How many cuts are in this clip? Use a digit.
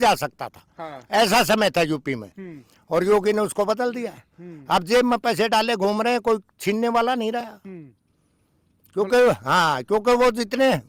0